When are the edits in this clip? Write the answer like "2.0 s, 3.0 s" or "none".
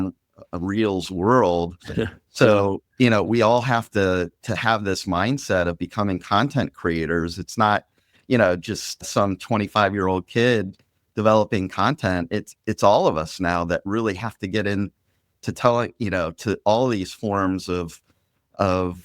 none